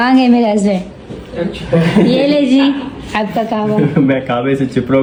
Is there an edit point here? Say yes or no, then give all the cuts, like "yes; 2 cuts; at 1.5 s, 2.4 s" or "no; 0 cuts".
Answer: no; 0 cuts